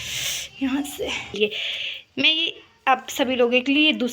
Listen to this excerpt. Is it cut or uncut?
cut